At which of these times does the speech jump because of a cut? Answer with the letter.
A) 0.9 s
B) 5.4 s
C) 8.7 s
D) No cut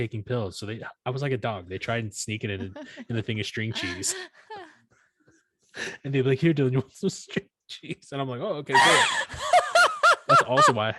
D